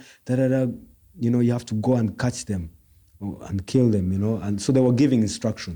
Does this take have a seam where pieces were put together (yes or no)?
no